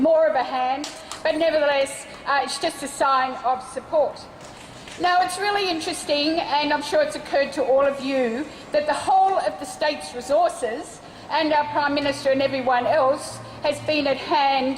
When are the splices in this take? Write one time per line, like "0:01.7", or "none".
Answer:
0:09.0